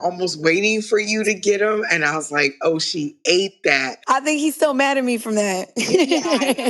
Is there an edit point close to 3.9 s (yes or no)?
yes